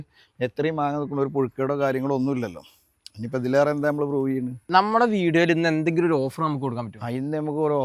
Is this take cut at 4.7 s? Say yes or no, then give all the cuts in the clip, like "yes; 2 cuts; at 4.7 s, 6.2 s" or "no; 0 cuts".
yes; 1 cut; at 4.7 s